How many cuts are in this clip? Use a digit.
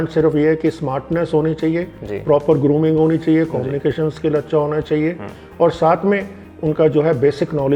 0